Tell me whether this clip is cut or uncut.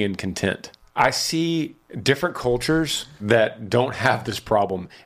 cut